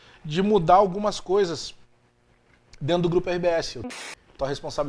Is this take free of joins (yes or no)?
no